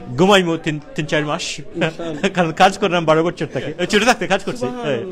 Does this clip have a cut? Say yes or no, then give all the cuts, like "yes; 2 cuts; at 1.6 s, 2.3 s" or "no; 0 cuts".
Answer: yes; 1 cut; at 3.8 s